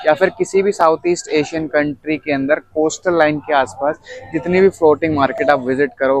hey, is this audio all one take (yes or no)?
yes